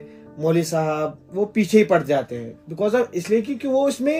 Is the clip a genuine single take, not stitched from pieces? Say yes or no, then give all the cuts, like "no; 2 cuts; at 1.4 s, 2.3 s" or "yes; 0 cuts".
yes; 0 cuts